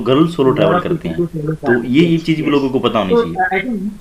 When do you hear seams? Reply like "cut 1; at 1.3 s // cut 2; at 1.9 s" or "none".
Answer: none